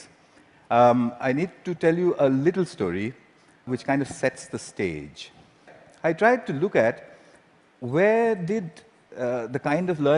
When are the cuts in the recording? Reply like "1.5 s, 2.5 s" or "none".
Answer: 8.0 s